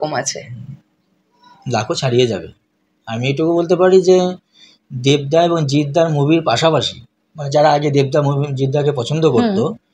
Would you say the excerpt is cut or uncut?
uncut